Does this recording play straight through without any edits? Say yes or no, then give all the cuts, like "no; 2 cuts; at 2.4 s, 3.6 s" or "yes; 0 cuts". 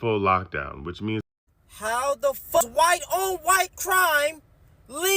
no; 2 cuts; at 1.2 s, 2.6 s